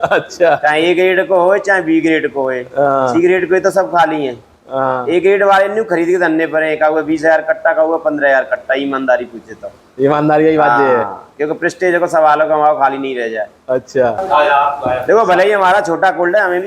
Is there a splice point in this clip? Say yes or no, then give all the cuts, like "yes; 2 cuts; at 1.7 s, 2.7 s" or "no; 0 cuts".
yes; 1 cut; at 14.2 s